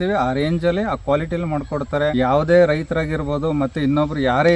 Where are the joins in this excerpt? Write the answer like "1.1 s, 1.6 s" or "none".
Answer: 2.1 s